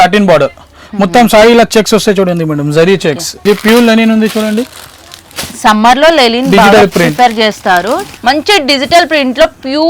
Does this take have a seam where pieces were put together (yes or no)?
yes